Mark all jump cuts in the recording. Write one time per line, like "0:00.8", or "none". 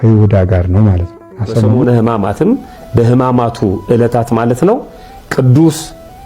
0:01.7